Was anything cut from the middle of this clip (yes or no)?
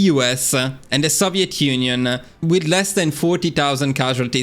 yes